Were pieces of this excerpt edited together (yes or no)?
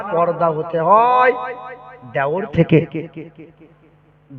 no